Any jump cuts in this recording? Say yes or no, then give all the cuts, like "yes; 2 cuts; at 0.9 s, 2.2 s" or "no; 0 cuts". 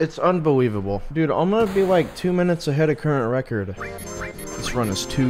yes; 2 cuts; at 1.0 s, 3.8 s